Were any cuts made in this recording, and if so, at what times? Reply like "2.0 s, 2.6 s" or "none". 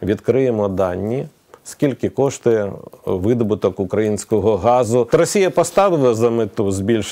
5.1 s